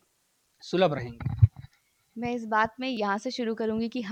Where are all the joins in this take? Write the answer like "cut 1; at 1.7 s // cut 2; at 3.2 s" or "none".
none